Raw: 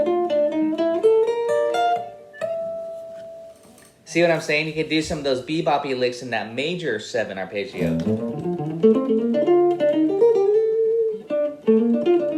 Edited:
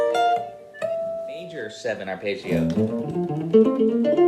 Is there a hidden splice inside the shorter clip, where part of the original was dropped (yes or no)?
yes